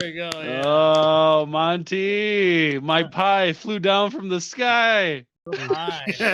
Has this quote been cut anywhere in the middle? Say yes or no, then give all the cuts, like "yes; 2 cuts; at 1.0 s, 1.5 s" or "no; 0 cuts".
no; 0 cuts